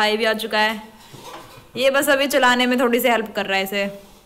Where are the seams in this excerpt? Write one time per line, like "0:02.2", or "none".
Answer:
none